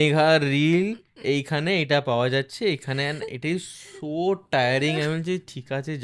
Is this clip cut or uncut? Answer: uncut